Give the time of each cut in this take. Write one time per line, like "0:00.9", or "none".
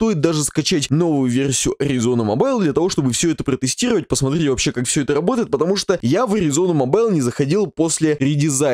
none